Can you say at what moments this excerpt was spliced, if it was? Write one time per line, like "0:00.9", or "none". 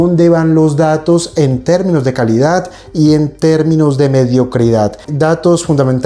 0:05.0